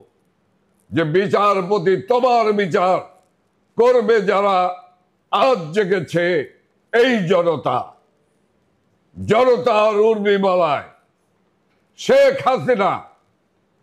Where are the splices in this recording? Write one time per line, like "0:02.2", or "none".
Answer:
none